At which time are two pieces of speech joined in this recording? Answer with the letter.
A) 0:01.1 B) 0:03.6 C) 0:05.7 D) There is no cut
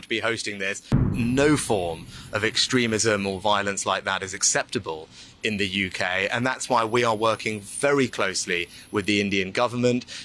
A